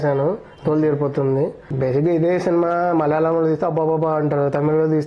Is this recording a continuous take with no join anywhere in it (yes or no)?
no